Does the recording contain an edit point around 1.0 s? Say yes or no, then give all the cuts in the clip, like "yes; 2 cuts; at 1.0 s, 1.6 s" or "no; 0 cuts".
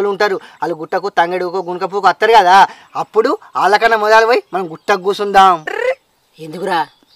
no; 0 cuts